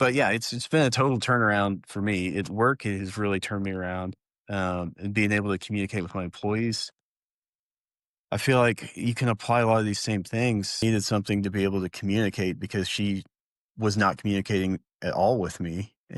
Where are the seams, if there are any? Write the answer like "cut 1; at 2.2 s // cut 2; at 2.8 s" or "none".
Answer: cut 1; at 10.8 s